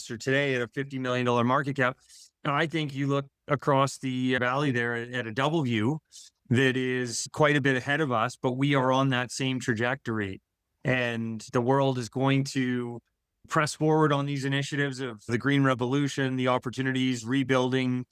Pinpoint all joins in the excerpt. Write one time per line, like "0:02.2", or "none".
0:04.4